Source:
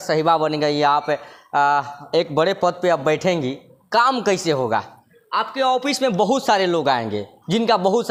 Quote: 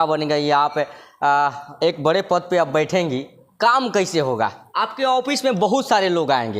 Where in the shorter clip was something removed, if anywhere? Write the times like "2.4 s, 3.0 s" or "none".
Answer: 4.6 s